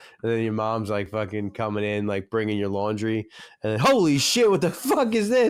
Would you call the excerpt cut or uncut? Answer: uncut